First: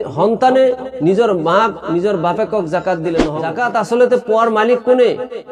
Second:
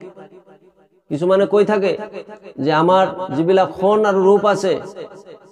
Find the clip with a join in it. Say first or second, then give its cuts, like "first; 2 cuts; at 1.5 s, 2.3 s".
first; 1 cut; at 3.4 s